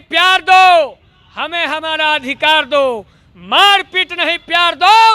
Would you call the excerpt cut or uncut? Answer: uncut